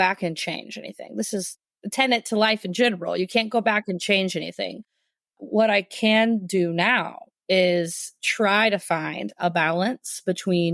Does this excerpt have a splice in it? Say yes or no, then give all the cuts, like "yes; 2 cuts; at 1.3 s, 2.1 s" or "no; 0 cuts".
yes; 1 cut; at 1.5 s